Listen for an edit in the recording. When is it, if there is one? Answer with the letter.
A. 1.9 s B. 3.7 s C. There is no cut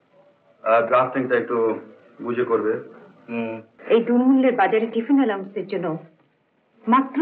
B